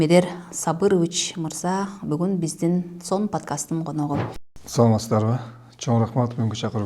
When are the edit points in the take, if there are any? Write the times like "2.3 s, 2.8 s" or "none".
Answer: 4.5 s